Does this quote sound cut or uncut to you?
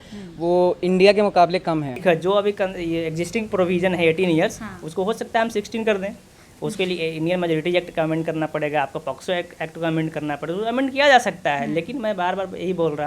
cut